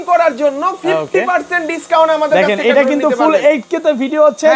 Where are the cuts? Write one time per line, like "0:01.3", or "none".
none